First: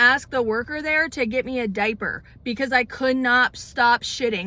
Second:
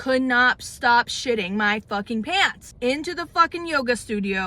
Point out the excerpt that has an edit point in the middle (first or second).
second